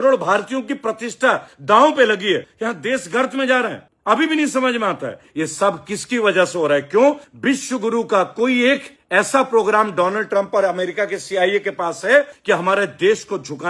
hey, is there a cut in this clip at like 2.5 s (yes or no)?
yes